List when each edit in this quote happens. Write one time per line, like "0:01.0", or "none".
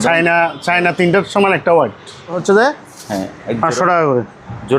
0:02.4